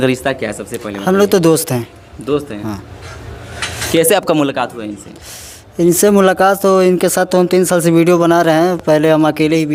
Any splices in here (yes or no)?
no